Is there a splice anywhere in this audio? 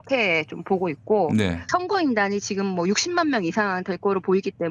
yes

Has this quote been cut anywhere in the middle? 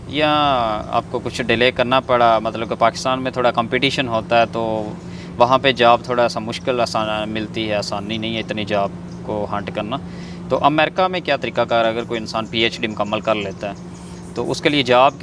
no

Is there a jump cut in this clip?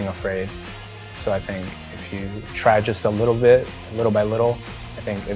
no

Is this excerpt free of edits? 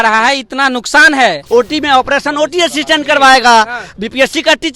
no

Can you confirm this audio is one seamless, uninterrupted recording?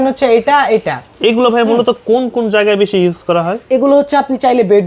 yes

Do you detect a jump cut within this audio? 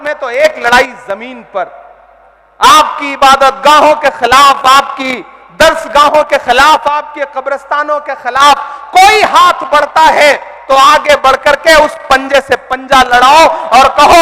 no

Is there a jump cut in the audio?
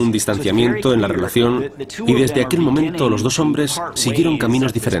no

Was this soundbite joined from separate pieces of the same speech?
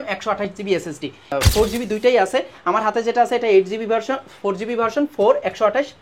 yes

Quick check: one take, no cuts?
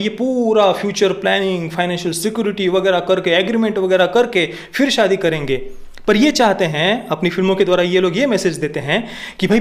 yes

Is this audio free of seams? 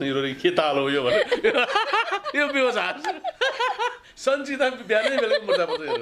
yes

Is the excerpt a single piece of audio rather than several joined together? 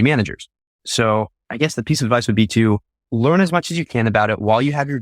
yes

